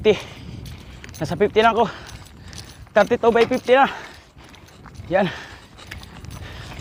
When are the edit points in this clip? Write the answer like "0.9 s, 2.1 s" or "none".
none